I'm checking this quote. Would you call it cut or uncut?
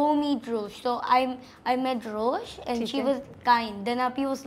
uncut